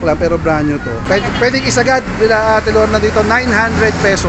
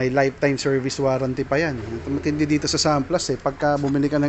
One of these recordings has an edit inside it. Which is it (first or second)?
first